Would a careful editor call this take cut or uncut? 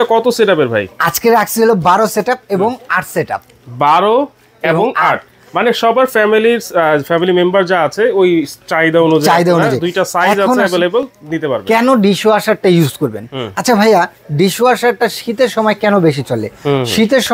uncut